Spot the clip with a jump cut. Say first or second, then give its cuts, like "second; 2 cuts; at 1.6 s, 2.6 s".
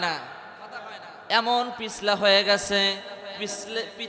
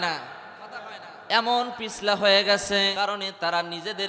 second; 1 cut; at 2.9 s